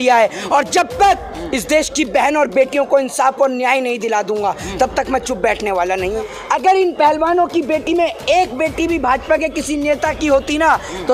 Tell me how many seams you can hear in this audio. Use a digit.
1